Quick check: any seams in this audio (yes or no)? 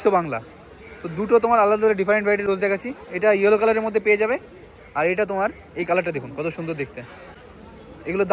no